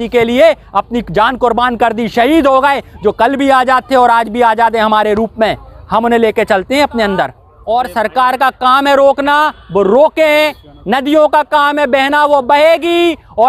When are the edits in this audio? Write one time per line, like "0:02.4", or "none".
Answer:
0:07.5